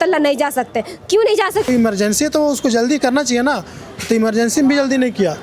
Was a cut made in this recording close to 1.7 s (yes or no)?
yes